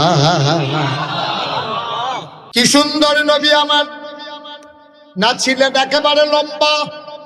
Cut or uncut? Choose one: cut